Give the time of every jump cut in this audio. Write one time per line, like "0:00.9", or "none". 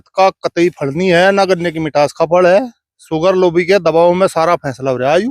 none